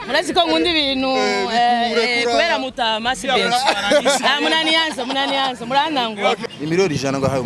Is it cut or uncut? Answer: cut